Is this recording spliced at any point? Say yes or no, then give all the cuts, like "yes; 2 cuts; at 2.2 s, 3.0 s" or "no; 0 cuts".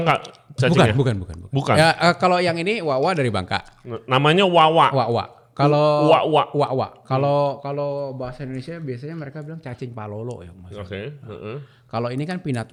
no; 0 cuts